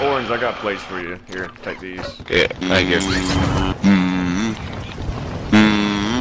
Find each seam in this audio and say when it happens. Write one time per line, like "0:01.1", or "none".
0:02.6
0:03.7